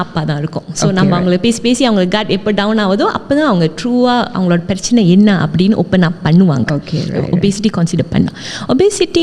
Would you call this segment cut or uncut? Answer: uncut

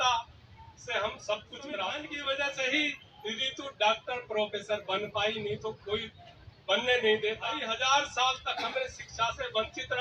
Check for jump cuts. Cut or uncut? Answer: cut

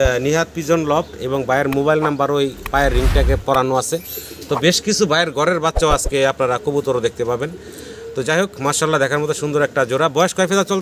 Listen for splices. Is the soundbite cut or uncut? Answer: uncut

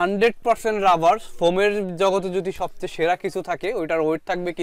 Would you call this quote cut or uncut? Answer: uncut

